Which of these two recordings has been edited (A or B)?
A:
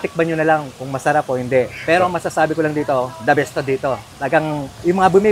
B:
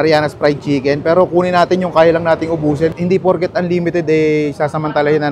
B